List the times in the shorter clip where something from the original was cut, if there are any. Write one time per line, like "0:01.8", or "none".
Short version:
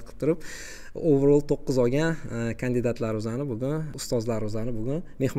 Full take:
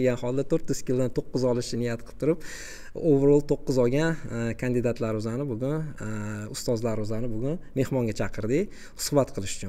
0:03.9